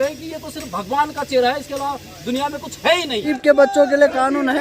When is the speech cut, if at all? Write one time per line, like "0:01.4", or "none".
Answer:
0:03.3